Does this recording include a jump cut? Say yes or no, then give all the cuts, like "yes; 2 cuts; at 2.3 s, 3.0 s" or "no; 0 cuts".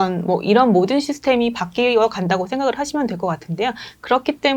no; 0 cuts